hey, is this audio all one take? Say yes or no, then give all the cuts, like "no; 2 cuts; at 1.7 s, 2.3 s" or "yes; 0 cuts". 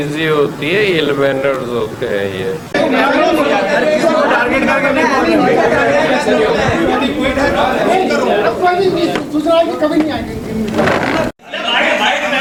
yes; 0 cuts